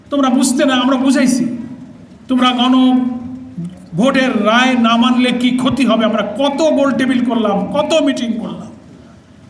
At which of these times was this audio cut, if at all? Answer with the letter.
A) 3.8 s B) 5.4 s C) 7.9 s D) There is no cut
D